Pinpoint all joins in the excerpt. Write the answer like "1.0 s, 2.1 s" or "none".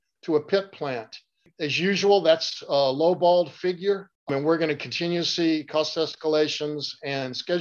1.5 s, 4.1 s